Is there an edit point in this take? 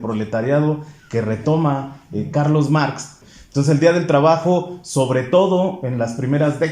yes; 1 cut; at 3.1 s

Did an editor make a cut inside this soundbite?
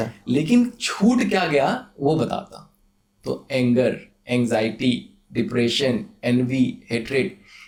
no; 0 cuts

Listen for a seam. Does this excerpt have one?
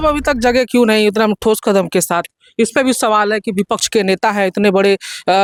no; 0 cuts

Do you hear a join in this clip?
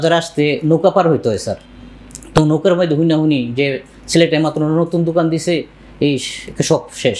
no; 0 cuts

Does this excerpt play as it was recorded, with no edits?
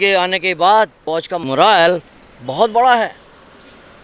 no; 1 cut; at 1.4 s

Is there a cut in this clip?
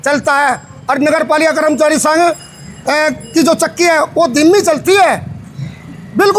no; 0 cuts

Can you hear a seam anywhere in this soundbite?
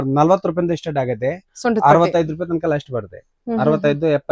no; 0 cuts

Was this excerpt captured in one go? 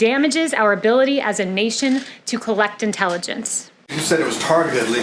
no; 1 cut; at 3.9 s

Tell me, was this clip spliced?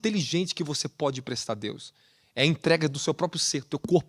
no; 0 cuts

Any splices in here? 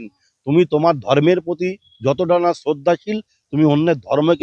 no; 0 cuts

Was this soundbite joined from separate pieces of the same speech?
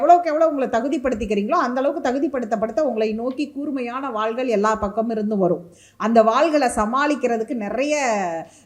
no; 0 cuts

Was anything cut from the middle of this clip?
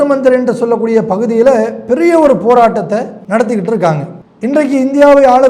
yes; 1 cut; at 3.2 s

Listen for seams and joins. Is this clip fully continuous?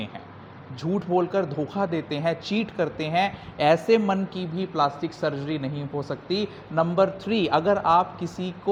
yes; 0 cuts

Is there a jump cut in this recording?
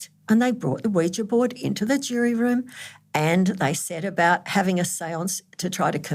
no; 0 cuts

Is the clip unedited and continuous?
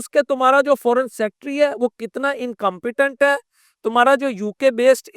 yes; 0 cuts

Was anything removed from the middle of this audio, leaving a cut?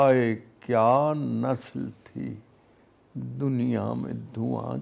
no; 0 cuts

